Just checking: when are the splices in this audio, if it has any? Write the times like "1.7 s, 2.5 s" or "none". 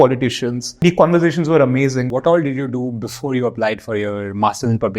0.8 s, 2.1 s